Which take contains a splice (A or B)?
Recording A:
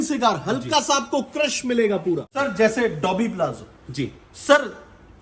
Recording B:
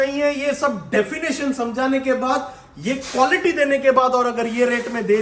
A